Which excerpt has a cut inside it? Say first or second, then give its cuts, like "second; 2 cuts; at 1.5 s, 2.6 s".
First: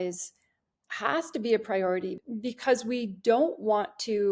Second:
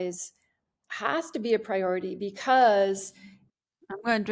first; 1 cut; at 2.2 s